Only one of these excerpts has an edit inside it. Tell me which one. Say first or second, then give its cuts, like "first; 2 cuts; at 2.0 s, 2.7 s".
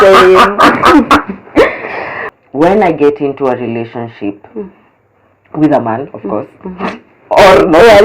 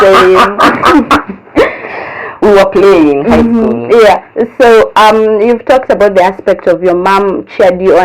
first; 1 cut; at 2.3 s